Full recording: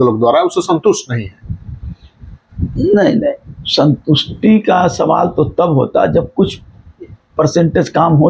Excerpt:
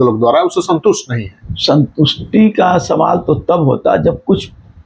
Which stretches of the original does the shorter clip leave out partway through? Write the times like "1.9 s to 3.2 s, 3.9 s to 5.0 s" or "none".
1.4 s to 3.5 s